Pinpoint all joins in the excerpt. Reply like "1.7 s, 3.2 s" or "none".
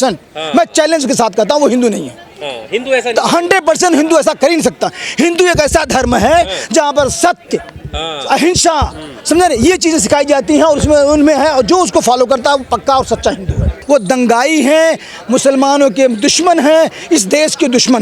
13.8 s

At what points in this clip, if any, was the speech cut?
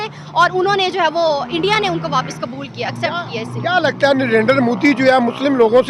none

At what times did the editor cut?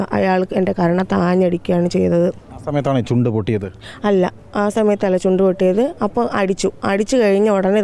none

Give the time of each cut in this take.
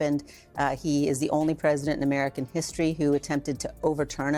none

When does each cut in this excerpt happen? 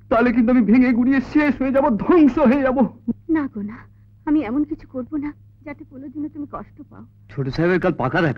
7.2 s

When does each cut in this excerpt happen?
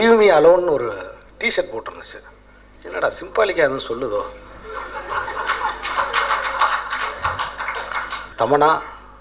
8.2 s

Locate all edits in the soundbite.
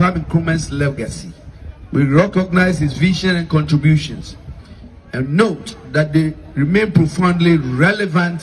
none

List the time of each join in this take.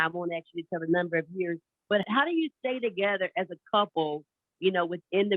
2.0 s

